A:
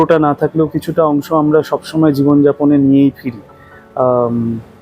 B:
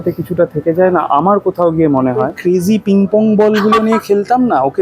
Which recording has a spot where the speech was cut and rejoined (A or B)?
B